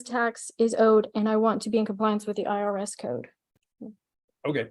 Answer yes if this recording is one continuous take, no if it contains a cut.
yes